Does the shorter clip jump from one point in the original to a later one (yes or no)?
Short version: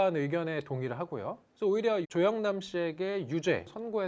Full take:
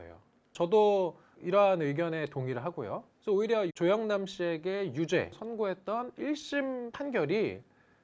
no